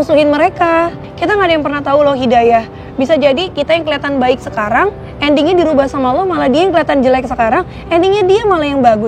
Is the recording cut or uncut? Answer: cut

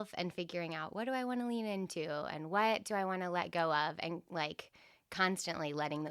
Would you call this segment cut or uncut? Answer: uncut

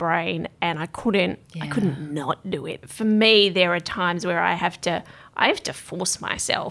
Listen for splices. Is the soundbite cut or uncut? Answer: cut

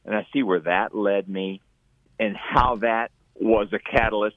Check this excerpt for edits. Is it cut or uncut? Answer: cut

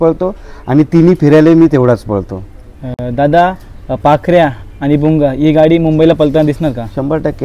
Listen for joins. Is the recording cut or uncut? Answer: uncut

